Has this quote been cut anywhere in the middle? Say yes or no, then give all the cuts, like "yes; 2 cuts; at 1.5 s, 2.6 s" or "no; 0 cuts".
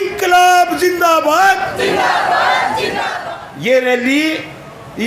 yes; 1 cut; at 3.1 s